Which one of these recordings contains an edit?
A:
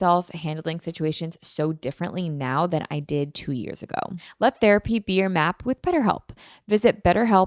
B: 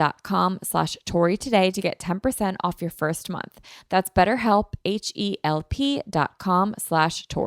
A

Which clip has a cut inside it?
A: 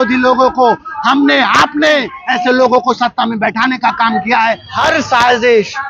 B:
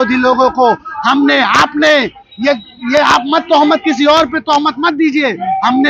A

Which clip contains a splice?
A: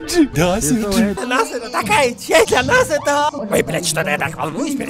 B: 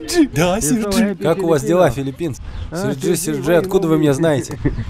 A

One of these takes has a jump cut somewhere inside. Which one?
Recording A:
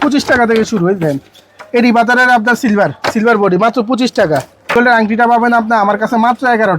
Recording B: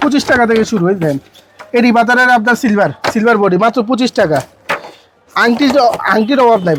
A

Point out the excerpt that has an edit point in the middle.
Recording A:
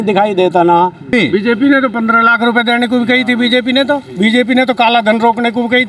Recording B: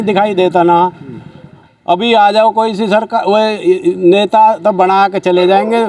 A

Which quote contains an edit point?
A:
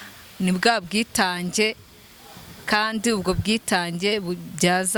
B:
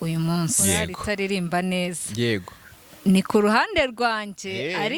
B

